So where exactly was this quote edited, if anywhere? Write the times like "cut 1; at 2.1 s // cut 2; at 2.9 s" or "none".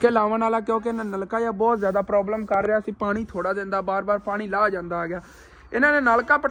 none